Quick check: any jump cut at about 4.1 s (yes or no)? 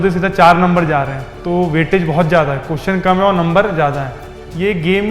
yes